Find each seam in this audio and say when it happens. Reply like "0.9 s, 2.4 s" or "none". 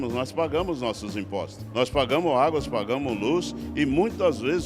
1.6 s